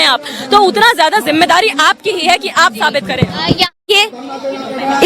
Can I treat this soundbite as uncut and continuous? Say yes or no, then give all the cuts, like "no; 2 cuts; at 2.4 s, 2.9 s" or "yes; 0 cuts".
no; 1 cut; at 3.9 s